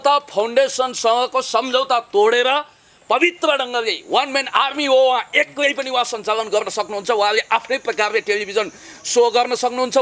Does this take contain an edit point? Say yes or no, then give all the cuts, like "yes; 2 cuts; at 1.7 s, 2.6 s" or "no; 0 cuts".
no; 0 cuts